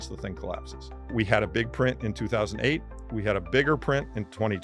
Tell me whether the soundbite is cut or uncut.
cut